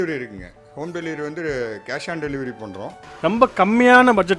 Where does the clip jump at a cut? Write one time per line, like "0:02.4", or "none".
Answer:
0:03.0